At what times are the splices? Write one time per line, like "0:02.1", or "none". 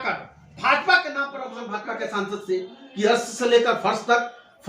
0:01.7